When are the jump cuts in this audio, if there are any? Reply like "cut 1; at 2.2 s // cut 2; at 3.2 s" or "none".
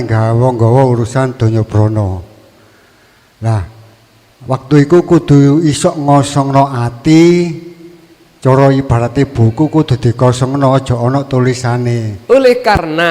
cut 1; at 12.1 s

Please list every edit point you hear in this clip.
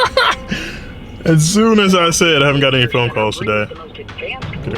none

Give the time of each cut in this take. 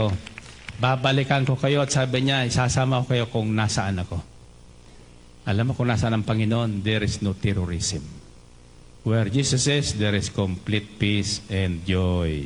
none

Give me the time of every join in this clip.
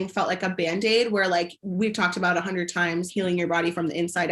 cut 1; at 1.6 s // cut 2; at 3.1 s

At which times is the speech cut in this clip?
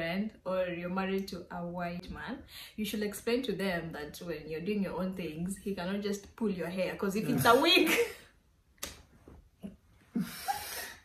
cut 1; at 2.0 s

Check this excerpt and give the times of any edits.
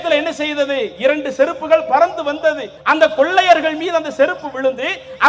cut 1; at 2.7 s

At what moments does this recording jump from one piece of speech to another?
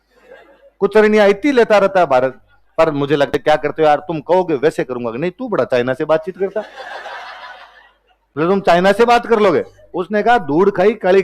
cut 1; at 3.3 s

